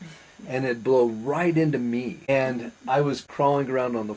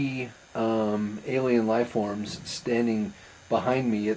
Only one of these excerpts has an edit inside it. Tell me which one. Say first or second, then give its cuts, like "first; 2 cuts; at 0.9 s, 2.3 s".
first; 2 cuts; at 2.2 s, 3.2 s